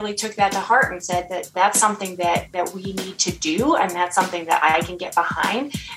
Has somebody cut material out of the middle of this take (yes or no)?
yes